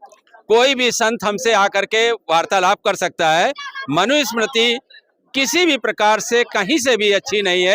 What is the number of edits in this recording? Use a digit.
0